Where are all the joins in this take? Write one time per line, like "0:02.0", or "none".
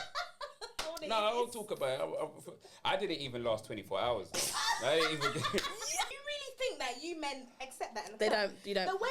0:06.1